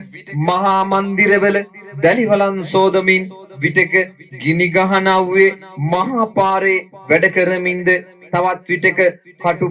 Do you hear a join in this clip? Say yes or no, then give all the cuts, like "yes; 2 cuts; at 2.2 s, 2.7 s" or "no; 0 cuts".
no; 0 cuts